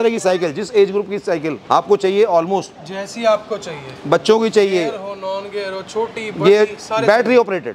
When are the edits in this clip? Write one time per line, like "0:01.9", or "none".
none